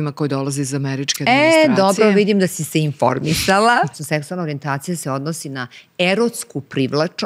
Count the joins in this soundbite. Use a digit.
1